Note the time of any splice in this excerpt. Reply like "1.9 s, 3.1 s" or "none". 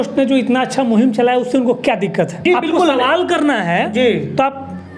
2.4 s